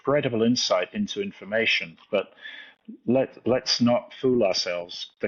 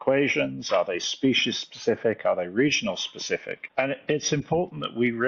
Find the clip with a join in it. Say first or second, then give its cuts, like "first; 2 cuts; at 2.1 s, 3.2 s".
second; 1 cut; at 3.6 s